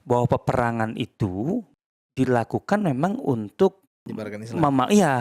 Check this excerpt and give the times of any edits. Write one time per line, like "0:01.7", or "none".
0:01.7
0:04.1